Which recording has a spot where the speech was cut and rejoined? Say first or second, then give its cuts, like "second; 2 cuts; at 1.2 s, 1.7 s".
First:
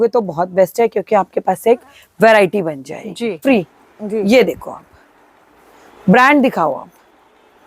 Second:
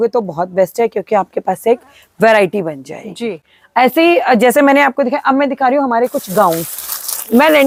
first; 1 cut; at 3.4 s